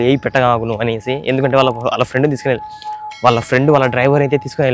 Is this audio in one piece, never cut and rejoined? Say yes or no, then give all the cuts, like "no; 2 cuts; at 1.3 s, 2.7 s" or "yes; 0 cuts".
yes; 0 cuts